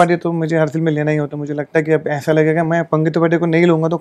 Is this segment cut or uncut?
uncut